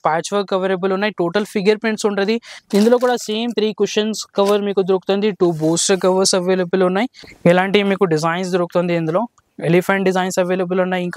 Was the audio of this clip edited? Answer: yes; 2 cuts; at 2.5 s, 7.2 s

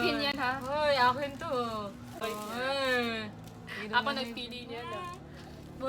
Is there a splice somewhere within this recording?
yes; 1 cut; at 2.2 s

